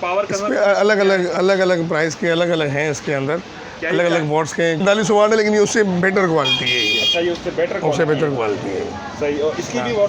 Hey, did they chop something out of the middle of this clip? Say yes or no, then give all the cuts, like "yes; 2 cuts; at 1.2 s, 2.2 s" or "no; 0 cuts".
yes; 1 cut; at 4.8 s